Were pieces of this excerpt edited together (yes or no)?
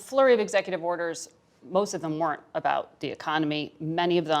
no